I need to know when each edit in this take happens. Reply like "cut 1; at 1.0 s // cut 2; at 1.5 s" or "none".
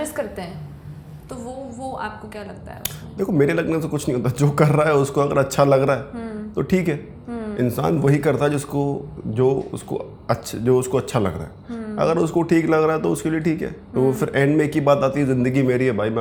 none

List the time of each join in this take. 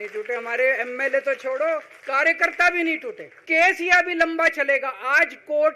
cut 1; at 2.0 s // cut 2; at 3.4 s

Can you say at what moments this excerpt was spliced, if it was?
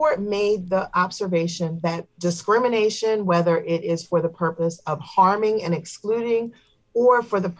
none

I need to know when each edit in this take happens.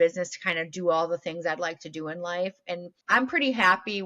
cut 1; at 2.9 s

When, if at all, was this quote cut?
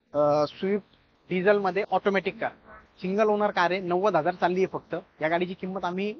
none

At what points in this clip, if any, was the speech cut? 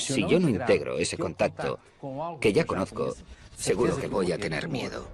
cut 1; at 3.3 s

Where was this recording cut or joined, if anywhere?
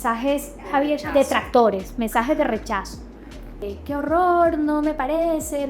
cut 1; at 3.6 s

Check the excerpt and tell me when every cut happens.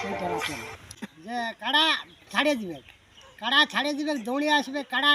cut 1; at 0.9 s

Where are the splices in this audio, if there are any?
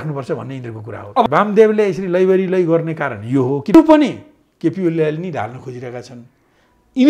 cut 1; at 1.3 s // cut 2; at 3.7 s

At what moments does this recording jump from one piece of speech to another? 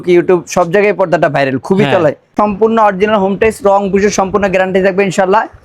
cut 1; at 2.3 s

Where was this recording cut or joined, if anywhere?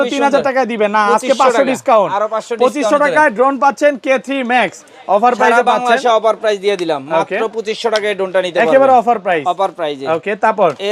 none

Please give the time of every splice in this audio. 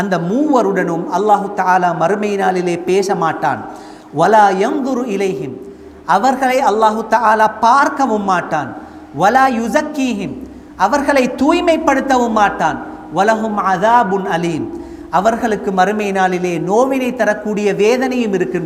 none

